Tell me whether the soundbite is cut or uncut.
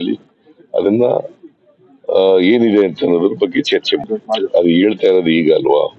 cut